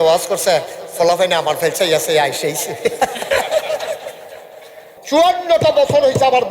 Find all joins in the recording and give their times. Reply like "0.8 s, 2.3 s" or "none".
4.9 s

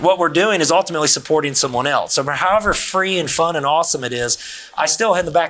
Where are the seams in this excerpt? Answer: none

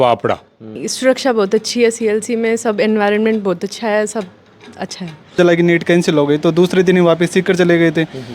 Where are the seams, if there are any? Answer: 0.8 s, 5.4 s

